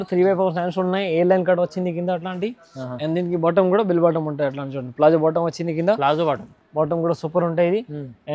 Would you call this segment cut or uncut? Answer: uncut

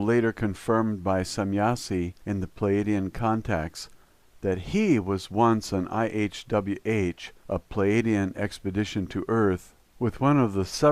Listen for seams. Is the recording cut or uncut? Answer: cut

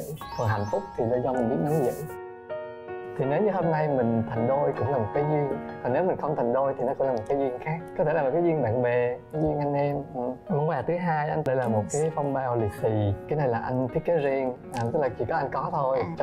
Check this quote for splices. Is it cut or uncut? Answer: uncut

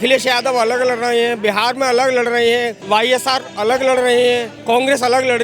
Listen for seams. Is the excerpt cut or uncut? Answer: cut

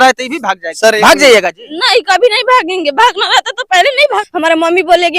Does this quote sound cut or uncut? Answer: cut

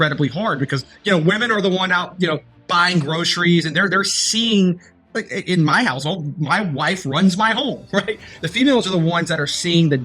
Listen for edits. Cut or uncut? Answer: cut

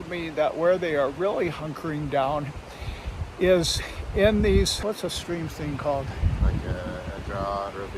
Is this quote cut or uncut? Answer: cut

